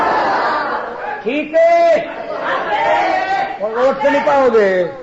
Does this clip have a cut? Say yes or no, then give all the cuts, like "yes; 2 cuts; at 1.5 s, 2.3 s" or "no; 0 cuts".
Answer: no; 0 cuts